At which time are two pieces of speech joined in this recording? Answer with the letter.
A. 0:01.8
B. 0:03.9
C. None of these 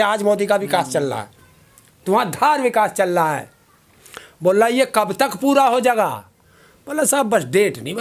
C